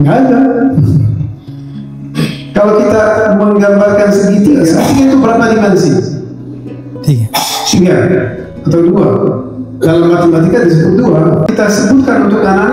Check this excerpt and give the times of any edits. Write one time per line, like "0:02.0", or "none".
0:04.8
0:11.5